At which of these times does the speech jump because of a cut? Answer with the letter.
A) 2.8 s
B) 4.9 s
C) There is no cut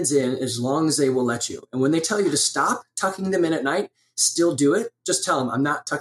B